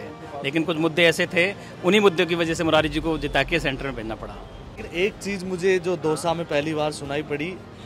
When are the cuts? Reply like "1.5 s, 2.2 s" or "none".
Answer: 4.8 s